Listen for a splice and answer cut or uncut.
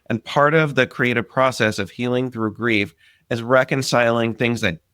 uncut